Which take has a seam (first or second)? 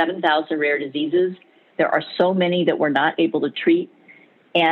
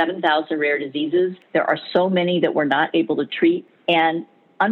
second